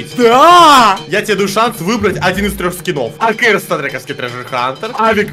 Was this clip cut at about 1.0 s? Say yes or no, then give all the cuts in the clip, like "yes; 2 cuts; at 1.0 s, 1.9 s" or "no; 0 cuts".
yes; 1 cut; at 1.0 s